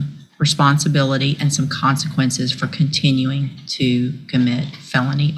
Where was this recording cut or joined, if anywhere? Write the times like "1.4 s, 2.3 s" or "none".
none